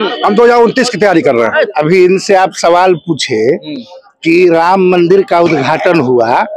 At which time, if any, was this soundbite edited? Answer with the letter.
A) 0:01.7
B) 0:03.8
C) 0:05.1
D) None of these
A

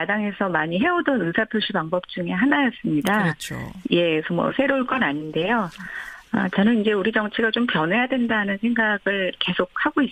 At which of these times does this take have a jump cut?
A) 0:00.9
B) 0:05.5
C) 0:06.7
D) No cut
A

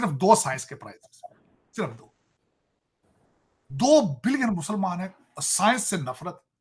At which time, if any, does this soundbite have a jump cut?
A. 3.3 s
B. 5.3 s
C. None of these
C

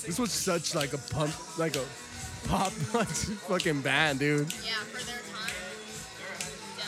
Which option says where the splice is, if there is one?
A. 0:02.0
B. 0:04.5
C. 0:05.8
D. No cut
D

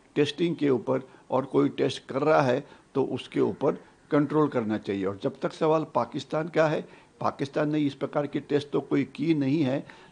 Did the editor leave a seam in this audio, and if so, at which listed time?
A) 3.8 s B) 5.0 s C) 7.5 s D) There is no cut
D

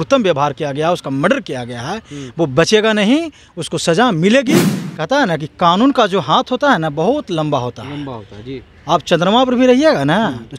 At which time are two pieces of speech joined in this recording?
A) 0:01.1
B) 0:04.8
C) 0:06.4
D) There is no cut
B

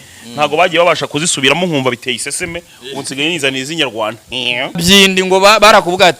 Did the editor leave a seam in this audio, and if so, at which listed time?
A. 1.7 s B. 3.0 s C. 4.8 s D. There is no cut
C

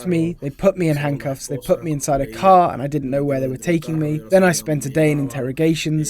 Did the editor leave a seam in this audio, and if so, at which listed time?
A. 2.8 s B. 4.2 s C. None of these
B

